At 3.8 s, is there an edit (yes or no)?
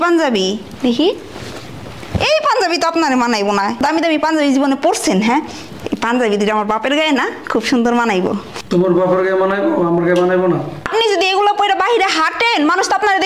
yes